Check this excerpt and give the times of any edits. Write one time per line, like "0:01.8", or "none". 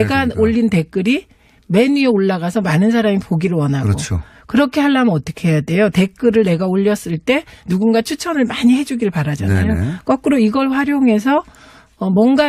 0:09.5